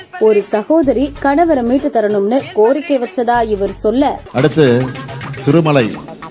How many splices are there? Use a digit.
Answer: 1